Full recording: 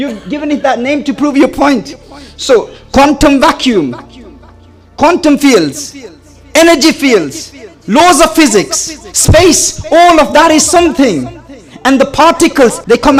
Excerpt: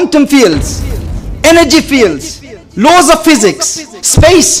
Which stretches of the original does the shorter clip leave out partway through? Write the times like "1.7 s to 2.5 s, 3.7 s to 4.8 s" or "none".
none